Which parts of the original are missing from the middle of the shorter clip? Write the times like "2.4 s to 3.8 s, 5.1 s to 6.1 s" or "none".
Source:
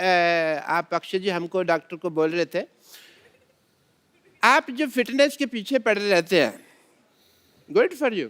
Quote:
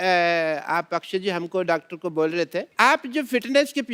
2.7 s to 4.3 s